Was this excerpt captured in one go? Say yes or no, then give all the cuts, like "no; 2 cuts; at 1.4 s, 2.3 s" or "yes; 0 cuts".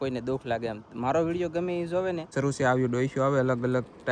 no; 1 cut; at 2.3 s